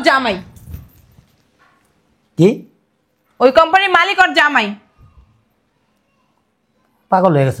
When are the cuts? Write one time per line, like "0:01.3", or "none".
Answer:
none